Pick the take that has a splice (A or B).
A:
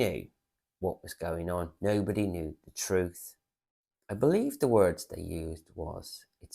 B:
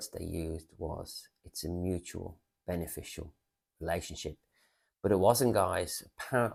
A